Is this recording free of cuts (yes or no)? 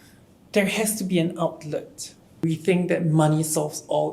no